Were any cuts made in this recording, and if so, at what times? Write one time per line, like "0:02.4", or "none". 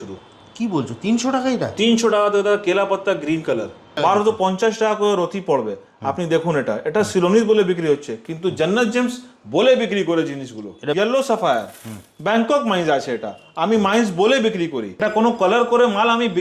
0:03.9
0:10.9
0:15.0